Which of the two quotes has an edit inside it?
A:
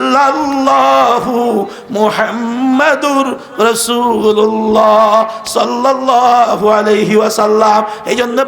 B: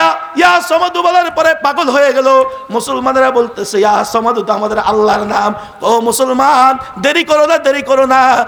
A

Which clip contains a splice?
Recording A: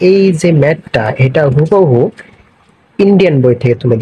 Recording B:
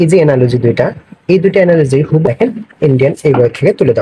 B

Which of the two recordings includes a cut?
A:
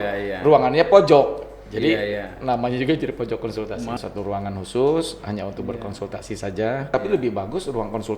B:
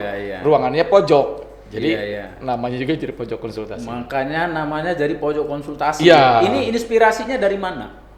A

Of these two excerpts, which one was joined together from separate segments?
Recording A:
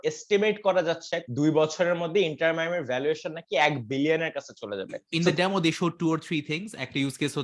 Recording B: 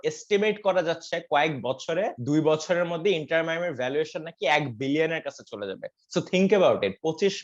A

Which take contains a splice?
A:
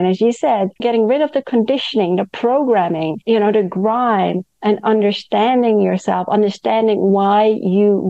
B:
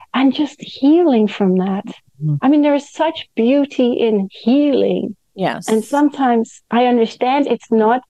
A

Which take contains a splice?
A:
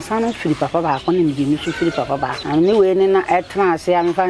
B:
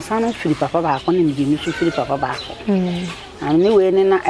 A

